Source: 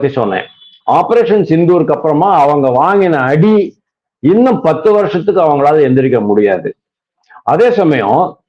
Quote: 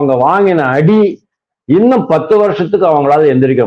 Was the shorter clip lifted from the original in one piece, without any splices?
yes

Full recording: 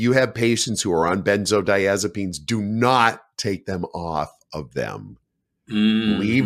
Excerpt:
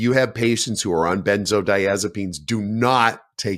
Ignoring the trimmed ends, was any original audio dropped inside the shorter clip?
no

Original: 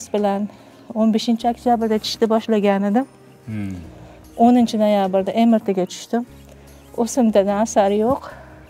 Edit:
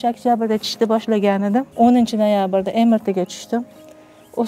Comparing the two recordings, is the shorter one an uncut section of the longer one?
no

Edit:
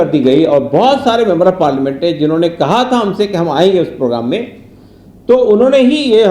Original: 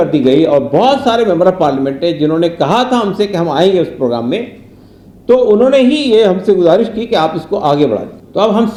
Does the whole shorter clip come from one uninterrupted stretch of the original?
yes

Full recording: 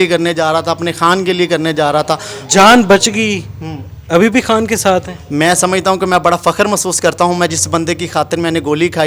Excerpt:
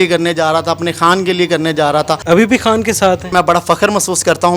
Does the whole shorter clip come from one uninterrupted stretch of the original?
no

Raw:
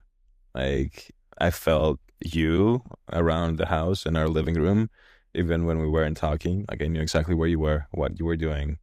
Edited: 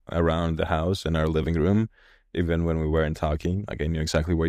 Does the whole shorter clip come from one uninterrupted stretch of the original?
yes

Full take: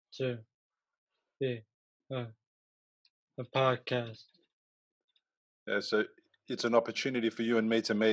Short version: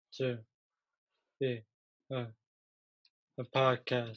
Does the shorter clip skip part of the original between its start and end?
no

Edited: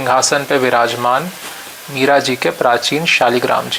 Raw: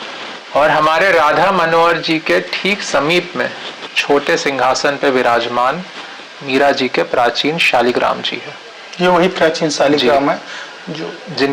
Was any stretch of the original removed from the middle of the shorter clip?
no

